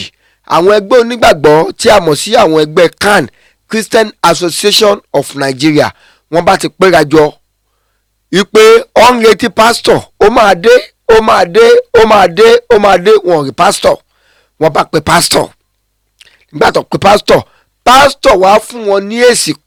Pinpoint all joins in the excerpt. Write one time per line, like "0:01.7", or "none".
none